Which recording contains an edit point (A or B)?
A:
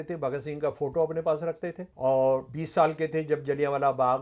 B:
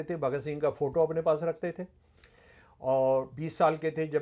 A